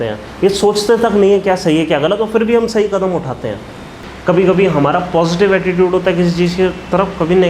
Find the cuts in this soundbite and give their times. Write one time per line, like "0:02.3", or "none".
0:04.1

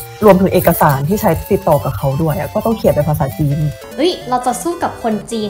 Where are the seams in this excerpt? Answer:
0:03.8

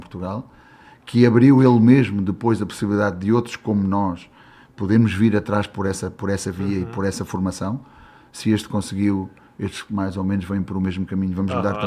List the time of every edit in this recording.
none

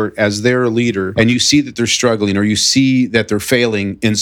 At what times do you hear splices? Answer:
0:01.1

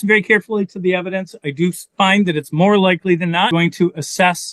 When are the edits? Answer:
0:03.5

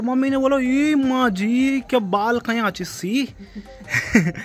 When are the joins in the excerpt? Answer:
none

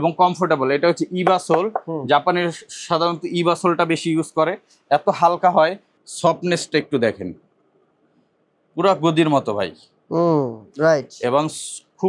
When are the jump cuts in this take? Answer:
0:05.9

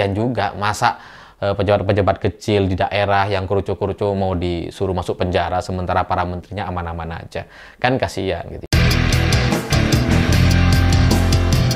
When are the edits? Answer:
0:08.6

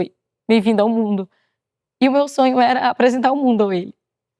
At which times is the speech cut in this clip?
none

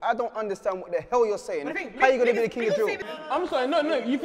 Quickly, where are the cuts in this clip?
0:03.1

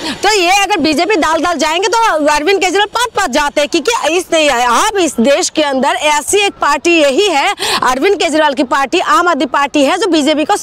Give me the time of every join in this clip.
none

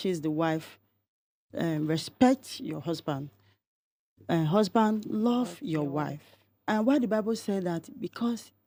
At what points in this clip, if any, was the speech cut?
none

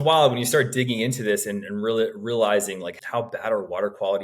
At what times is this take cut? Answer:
0:02.9

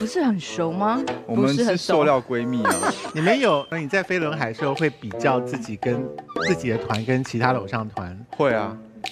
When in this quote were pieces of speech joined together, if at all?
0:03.8

